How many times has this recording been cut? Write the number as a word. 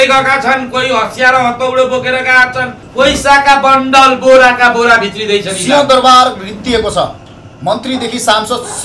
one